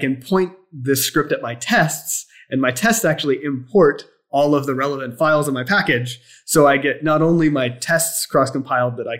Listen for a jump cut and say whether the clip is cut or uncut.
uncut